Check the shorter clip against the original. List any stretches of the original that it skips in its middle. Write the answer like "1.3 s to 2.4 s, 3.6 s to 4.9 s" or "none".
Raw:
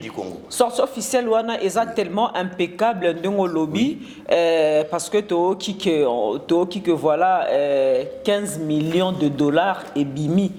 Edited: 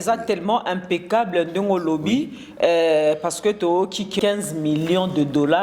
5.8 s to 8.1 s